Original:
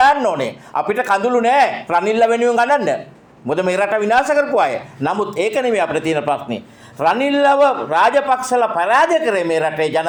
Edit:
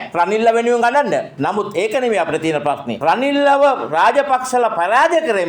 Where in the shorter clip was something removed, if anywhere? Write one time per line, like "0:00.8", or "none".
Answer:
0:01.3
0:02.9